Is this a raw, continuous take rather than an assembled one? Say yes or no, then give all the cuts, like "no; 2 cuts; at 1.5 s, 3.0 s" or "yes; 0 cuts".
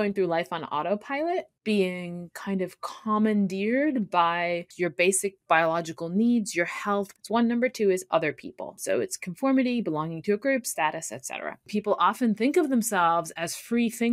no; 5 cuts; at 1.5 s, 4.7 s, 7.1 s, 8.8 s, 11.7 s